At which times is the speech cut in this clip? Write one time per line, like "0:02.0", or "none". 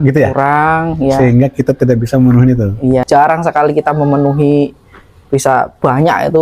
0:03.0